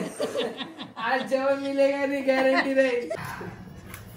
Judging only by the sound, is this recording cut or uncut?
cut